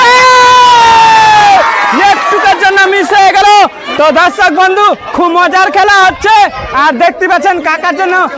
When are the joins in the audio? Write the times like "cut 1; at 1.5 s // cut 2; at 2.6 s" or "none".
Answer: none